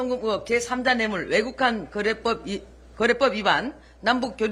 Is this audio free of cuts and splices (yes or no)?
yes